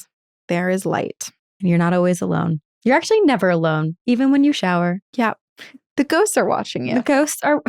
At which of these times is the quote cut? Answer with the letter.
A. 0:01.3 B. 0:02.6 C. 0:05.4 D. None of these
D